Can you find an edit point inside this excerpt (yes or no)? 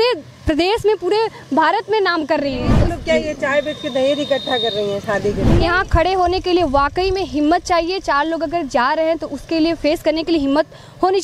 yes